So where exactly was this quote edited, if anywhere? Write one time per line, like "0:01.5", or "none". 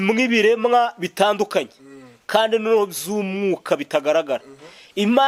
none